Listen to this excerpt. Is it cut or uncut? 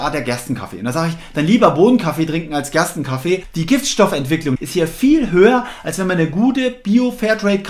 cut